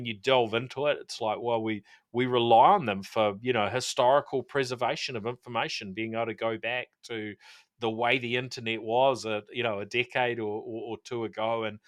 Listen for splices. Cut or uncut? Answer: uncut